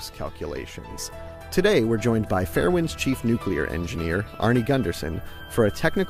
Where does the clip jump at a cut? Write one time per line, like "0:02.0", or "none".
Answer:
0:02.5